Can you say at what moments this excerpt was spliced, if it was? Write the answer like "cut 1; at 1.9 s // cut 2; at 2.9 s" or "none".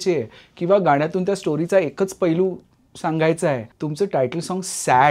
cut 1; at 3.7 s